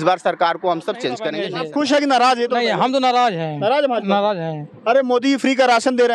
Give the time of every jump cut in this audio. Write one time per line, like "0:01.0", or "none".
0:01.3